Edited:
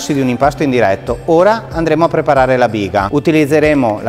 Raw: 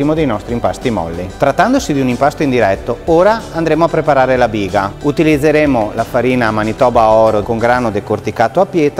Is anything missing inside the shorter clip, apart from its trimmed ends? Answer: yes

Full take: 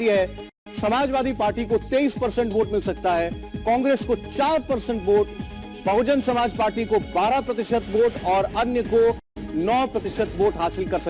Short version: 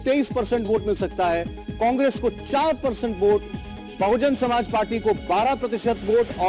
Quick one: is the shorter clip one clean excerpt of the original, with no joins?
yes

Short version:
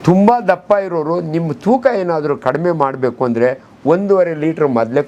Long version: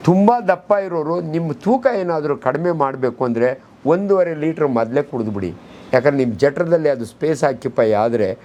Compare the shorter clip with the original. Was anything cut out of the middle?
no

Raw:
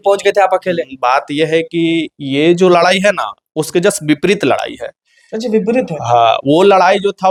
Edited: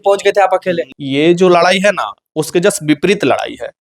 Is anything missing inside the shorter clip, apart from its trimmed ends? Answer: yes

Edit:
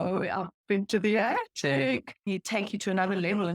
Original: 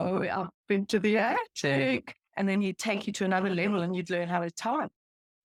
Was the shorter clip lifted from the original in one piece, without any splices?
no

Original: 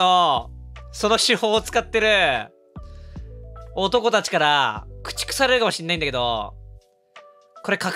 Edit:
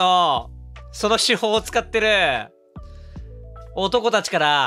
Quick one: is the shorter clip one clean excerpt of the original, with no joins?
yes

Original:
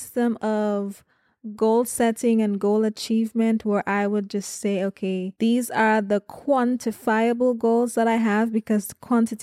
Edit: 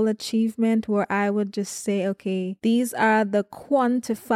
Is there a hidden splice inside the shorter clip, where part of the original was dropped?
no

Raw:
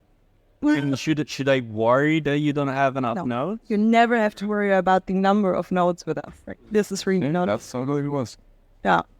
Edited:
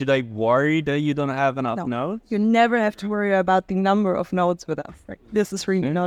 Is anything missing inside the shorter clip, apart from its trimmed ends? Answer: no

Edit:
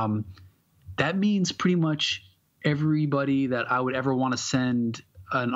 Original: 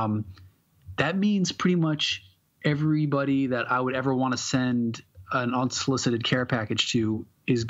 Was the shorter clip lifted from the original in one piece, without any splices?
yes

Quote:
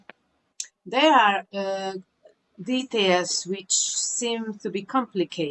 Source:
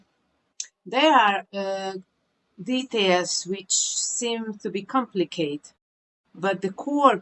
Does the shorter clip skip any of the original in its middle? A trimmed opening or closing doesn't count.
no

